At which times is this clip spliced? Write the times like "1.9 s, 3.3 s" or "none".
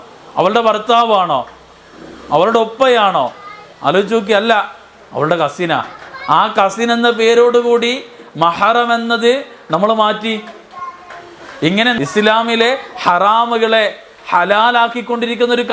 11.9 s

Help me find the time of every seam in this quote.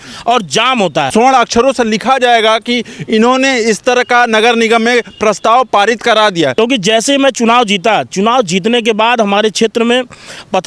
1.1 s, 6.5 s

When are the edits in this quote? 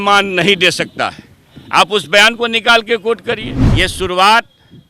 3.6 s

